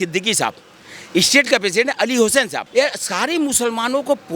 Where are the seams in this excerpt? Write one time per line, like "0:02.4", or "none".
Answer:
0:02.6